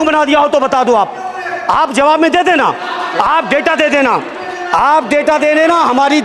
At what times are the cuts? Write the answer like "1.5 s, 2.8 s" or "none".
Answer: none